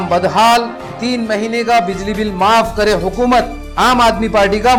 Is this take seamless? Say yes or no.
yes